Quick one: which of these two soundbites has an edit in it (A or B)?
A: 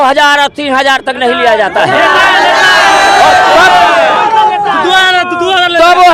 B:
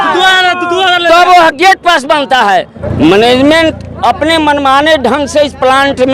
B